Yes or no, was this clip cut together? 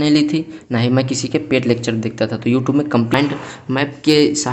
yes